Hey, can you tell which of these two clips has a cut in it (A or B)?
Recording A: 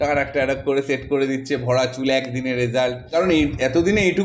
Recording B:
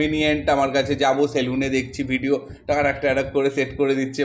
A